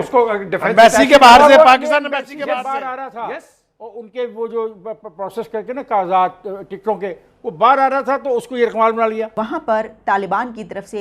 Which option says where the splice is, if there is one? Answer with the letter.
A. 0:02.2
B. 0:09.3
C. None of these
B